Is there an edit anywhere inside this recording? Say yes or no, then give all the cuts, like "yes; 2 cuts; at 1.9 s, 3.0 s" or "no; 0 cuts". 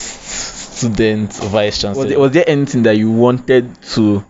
yes; 1 cut; at 2.0 s